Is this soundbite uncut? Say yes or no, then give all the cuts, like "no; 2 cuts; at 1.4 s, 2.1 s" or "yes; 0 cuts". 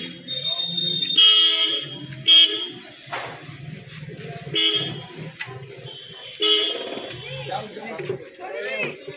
yes; 0 cuts